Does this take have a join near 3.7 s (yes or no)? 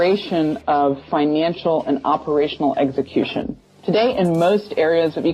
yes